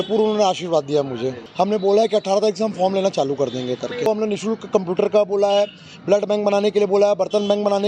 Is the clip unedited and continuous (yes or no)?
no